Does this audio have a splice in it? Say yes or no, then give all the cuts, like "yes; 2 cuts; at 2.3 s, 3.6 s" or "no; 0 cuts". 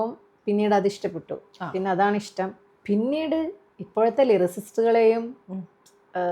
no; 0 cuts